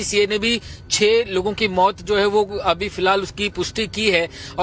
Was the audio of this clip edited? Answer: no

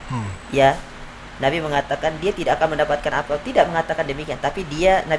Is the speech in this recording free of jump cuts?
yes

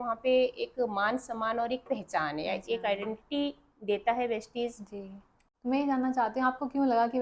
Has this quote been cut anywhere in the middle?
yes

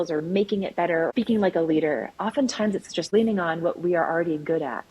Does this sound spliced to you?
yes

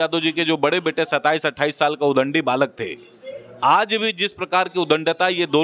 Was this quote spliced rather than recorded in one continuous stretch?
no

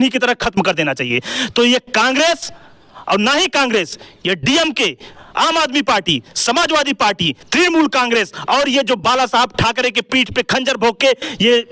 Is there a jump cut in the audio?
no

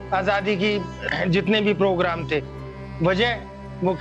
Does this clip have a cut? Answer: yes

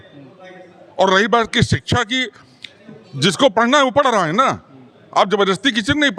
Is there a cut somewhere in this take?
no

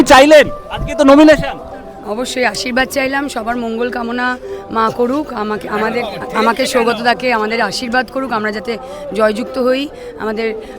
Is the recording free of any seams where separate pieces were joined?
yes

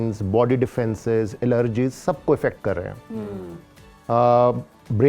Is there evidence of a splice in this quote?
no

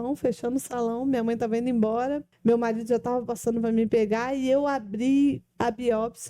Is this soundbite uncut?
no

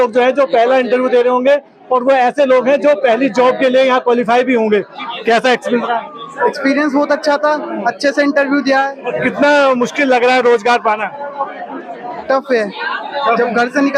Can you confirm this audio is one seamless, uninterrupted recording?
no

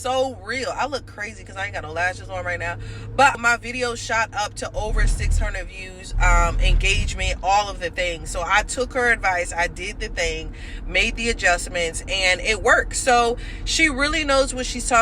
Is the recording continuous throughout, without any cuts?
no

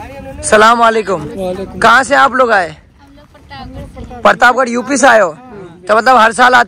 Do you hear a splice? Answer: no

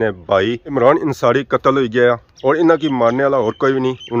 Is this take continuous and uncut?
no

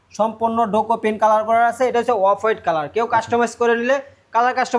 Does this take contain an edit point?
no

